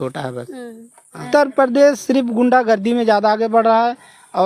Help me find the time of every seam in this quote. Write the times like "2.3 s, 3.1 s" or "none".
1.2 s